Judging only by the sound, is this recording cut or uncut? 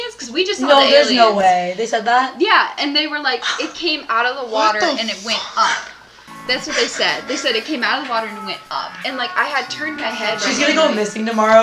uncut